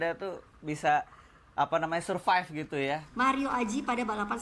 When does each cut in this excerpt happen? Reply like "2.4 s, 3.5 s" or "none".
3.1 s

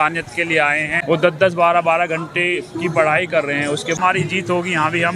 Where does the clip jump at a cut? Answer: 0.9 s, 4.0 s

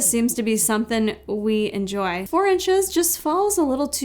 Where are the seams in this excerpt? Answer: 2.3 s

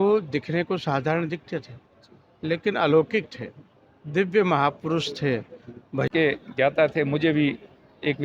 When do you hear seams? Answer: 6.1 s

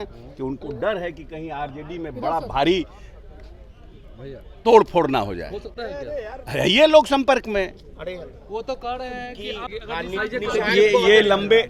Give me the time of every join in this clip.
9.7 s

